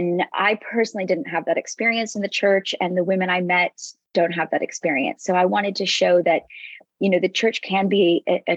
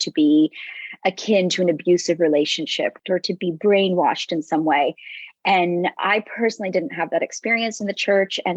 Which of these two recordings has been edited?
second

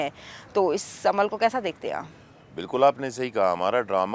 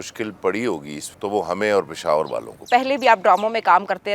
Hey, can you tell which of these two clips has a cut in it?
second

